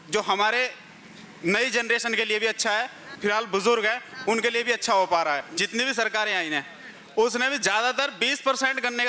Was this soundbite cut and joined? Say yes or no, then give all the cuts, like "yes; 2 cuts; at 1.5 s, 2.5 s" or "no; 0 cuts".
yes; 2 cuts; at 3.0 s, 5.5 s